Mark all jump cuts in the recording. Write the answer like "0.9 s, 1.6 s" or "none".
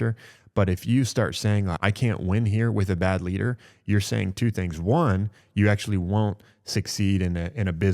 1.8 s